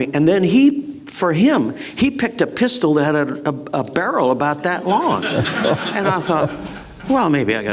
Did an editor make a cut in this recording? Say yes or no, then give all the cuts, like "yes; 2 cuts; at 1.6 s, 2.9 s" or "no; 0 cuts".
no; 0 cuts